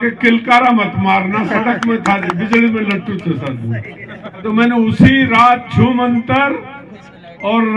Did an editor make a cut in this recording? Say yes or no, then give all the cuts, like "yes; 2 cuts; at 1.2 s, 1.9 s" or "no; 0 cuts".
yes; 1 cut; at 4.4 s